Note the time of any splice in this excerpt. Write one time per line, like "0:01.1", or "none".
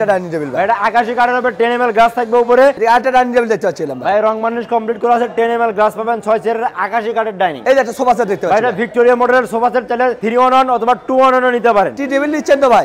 0:02.8
0:07.6
0:11.9